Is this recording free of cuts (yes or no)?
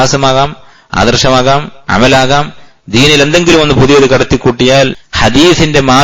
no